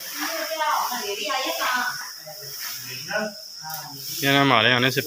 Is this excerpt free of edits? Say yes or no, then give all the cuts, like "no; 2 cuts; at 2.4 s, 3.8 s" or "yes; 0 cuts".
yes; 0 cuts